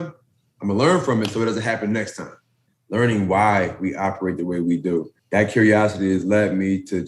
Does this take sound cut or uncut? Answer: cut